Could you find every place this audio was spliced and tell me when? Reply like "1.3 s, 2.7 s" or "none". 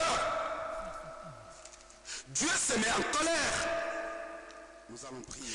none